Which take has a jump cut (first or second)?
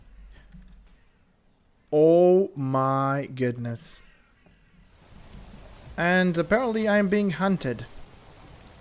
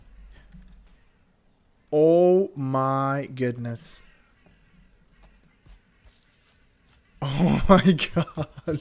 first